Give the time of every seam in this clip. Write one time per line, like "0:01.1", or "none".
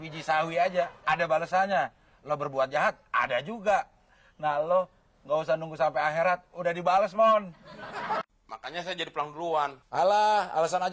0:08.2